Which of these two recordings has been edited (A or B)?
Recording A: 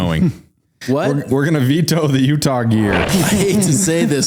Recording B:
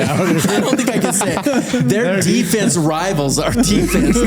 A